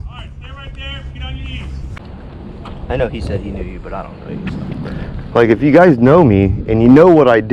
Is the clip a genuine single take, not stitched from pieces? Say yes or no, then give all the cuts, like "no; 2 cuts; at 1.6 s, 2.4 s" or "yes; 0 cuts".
no; 1 cut; at 2.0 s